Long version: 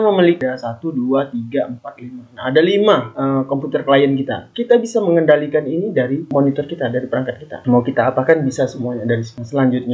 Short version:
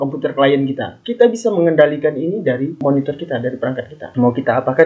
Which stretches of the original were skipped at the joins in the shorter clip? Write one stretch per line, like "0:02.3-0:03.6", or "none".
none